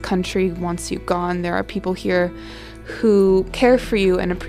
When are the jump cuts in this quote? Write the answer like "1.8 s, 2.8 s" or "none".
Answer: 3.5 s